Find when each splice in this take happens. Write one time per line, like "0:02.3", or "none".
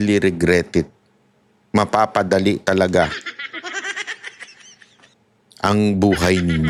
none